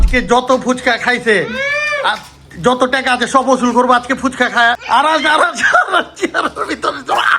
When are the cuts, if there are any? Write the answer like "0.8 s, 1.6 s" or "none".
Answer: 4.8 s